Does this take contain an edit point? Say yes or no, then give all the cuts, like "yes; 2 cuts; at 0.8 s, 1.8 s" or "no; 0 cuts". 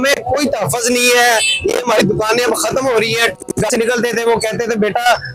yes; 1 cut; at 3.3 s